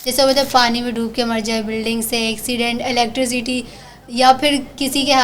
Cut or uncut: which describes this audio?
uncut